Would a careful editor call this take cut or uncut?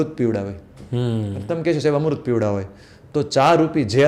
uncut